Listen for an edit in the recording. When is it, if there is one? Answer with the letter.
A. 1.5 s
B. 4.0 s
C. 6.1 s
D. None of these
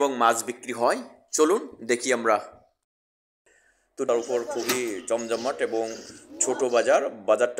B